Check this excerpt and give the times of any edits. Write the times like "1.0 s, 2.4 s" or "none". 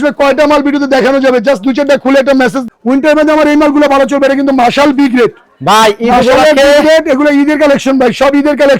2.6 s